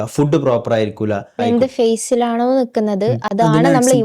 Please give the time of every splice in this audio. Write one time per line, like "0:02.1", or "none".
0:01.4